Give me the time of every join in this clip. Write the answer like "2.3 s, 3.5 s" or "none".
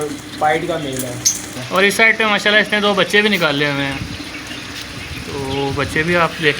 1.6 s